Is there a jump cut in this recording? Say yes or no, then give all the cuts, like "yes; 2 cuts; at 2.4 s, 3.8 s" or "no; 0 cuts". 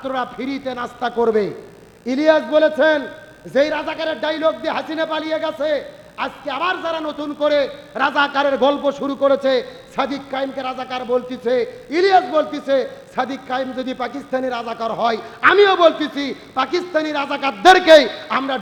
no; 0 cuts